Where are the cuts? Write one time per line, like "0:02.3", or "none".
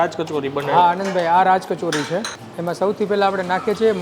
0:02.4